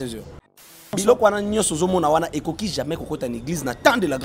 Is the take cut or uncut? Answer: cut